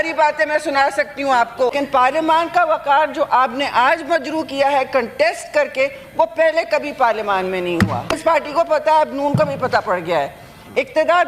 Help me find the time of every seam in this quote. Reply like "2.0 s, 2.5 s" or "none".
1.7 s, 8.1 s